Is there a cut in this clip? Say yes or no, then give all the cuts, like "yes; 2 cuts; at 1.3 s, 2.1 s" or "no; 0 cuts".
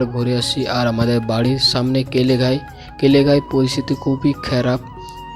no; 0 cuts